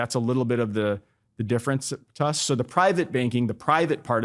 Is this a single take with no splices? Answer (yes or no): yes